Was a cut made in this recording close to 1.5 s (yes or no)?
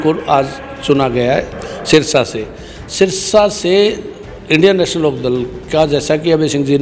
yes